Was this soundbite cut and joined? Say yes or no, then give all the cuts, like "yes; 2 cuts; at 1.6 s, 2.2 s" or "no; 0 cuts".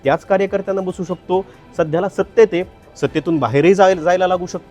no; 0 cuts